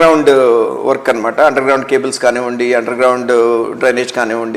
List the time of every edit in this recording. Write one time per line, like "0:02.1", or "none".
none